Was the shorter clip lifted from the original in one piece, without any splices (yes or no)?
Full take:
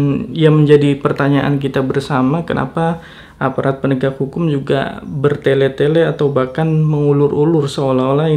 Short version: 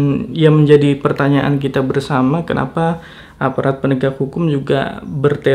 yes